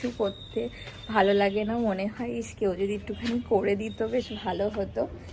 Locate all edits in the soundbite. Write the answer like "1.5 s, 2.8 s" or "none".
none